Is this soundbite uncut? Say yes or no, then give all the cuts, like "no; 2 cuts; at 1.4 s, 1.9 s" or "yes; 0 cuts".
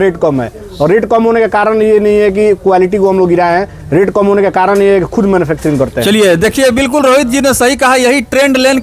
yes; 0 cuts